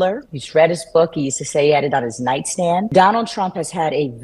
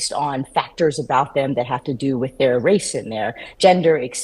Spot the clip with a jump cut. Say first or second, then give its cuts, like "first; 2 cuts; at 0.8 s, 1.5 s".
first; 1 cut; at 2.9 s